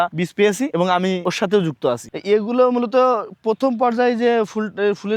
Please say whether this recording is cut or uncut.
uncut